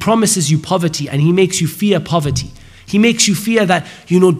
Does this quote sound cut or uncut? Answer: uncut